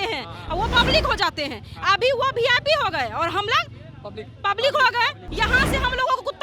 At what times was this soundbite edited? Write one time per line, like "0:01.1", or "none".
0:05.2